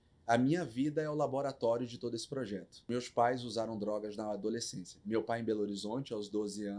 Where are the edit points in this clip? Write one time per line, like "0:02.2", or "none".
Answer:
0:02.9